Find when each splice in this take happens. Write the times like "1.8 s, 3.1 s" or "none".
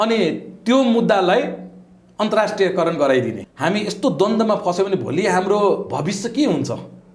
3.4 s